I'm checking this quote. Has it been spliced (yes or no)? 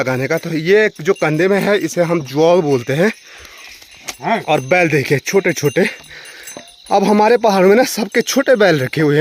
no